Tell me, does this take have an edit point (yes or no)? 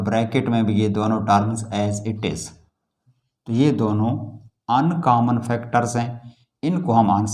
yes